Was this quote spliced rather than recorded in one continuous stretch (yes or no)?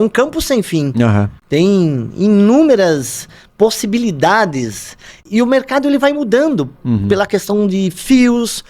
yes